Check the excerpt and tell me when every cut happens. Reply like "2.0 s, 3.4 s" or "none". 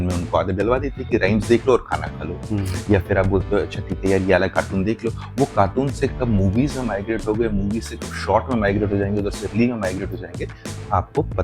none